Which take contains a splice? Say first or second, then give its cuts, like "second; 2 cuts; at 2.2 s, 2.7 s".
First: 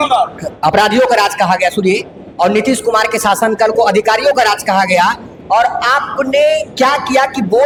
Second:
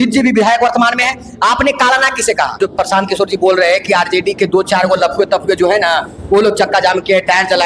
second; 1 cut; at 2.5 s